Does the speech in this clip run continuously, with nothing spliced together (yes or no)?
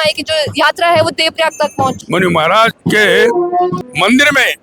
no